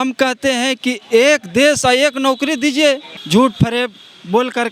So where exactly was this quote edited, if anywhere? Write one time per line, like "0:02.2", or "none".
0:03.1